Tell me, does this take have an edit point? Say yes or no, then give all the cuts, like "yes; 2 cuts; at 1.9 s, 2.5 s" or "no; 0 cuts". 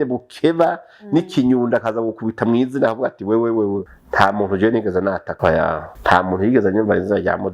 yes; 2 cuts; at 3.9 s, 5.7 s